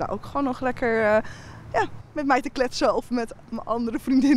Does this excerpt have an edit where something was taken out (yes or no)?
no